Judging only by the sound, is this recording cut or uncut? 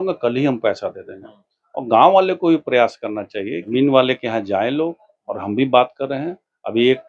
cut